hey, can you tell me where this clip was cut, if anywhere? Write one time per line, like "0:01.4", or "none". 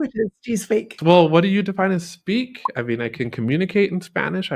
0:00.9